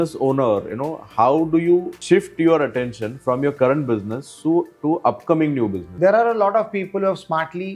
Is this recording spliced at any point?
yes; 2 cuts; at 1.9 s, 5.8 s

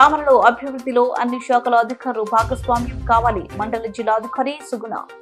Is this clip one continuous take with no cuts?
yes; 0 cuts

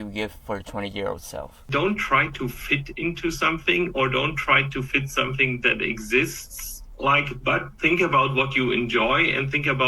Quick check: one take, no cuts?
no; 1 cut; at 1.6 s

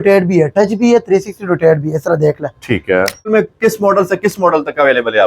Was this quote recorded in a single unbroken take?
no; 1 cut; at 3.3 s

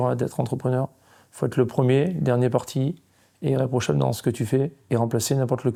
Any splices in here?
no; 0 cuts

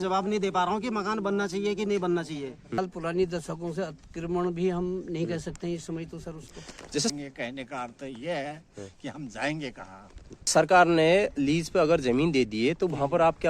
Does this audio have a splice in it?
yes; 3 cuts; at 2.8 s, 7.1 s, 10.5 s

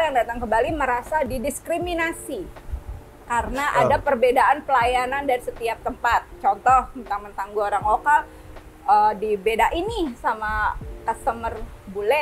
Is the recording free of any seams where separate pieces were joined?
yes; 0 cuts

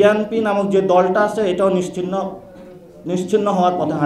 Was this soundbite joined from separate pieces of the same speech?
no; 0 cuts

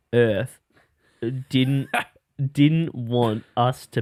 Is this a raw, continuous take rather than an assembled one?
yes; 0 cuts

